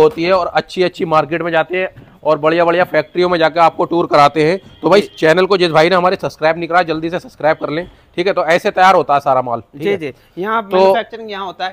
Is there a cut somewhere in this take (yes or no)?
no